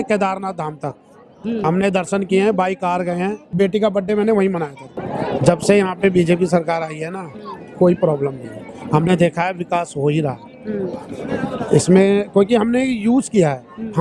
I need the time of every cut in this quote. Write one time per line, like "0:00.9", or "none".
0:03.4
0:05.0